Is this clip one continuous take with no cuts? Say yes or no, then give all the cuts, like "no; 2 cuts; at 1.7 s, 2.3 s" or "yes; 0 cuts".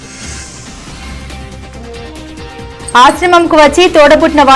no; 1 cut; at 2.8 s